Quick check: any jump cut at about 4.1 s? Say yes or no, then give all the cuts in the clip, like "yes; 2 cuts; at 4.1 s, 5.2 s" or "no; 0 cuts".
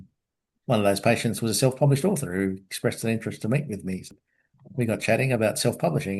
yes; 1 cut; at 4.1 s